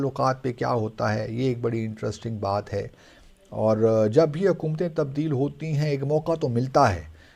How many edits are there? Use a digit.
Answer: 0